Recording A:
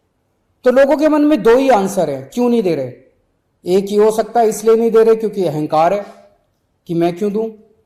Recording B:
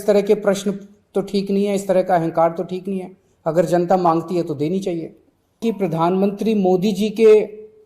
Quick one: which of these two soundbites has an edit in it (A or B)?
B